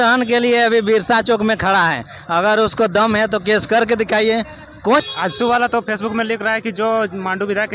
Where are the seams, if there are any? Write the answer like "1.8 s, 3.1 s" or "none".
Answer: 5.0 s